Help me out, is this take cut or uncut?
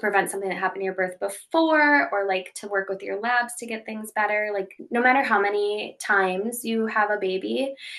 cut